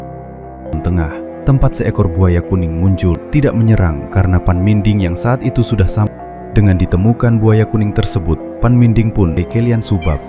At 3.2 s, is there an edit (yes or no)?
yes